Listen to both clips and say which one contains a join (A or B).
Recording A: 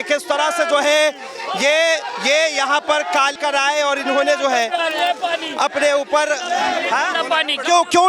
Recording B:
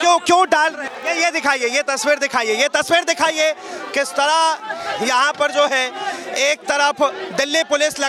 A